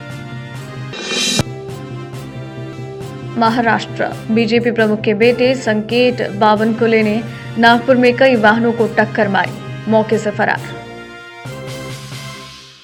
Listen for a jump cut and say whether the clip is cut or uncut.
uncut